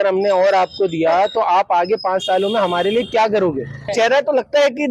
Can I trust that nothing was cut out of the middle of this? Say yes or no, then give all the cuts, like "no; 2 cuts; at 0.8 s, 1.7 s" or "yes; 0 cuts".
no; 1 cut; at 3.9 s